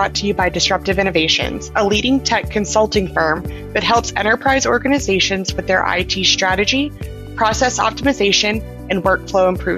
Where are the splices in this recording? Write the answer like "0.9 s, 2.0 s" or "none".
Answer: none